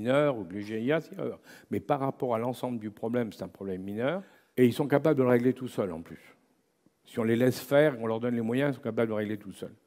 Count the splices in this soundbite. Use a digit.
1